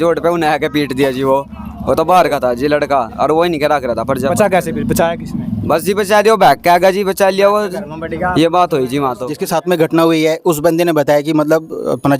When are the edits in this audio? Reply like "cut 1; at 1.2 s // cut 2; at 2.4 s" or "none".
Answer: cut 1; at 9.3 s